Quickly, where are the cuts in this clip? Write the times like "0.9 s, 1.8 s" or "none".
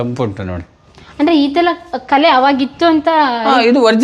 none